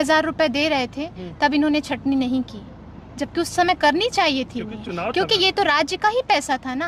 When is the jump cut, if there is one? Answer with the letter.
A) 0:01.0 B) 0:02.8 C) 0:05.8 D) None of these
D